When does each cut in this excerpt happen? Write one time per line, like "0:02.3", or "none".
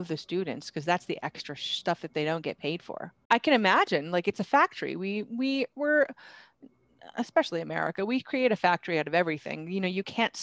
0:03.2